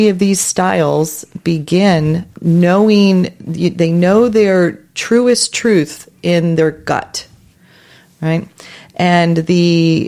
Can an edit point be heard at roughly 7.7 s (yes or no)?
no